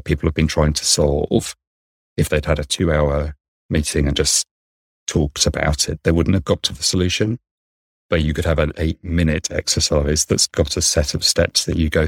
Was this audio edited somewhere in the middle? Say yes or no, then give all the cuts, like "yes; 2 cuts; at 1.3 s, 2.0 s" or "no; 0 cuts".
yes; 1 cut; at 5.9 s